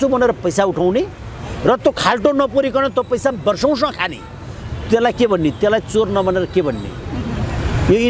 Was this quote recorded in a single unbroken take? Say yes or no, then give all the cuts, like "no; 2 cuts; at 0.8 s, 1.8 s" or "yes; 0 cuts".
yes; 0 cuts